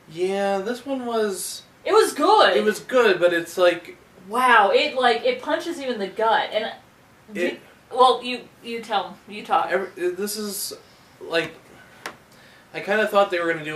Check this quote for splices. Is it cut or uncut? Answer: uncut